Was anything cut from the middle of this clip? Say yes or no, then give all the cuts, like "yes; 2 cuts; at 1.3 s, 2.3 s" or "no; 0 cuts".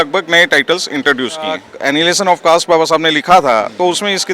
yes; 1 cut; at 1.7 s